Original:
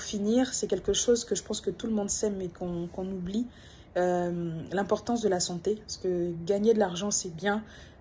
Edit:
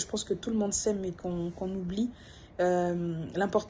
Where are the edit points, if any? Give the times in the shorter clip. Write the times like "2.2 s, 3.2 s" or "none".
none